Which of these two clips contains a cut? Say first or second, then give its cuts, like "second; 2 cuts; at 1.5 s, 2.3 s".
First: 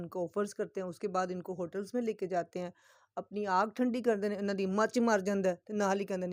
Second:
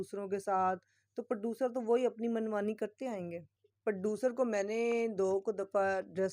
second; 1 cut; at 3.5 s